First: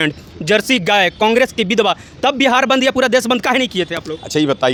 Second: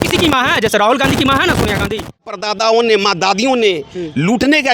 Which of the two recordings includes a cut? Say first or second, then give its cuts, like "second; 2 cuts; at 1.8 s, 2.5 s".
second; 1 cut; at 2.4 s